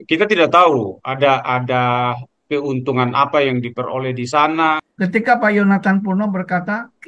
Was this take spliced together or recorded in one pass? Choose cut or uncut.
cut